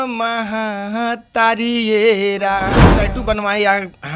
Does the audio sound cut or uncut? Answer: cut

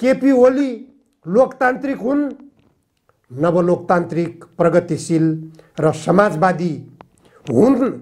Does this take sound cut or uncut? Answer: uncut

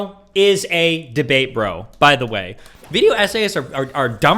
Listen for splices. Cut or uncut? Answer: cut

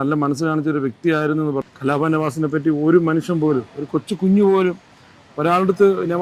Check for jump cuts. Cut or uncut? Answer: cut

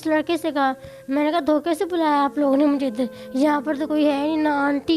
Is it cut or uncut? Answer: uncut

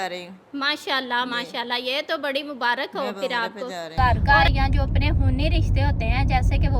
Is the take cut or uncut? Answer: cut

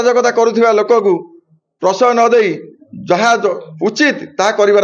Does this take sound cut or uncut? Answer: uncut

